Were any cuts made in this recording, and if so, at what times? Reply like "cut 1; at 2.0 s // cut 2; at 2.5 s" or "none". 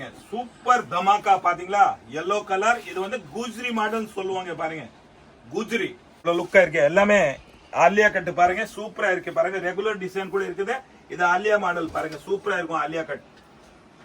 cut 1; at 6.1 s